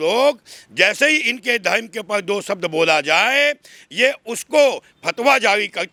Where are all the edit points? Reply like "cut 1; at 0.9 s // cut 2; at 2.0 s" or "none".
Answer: none